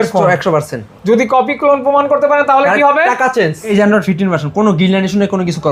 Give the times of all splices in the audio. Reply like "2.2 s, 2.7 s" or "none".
3.6 s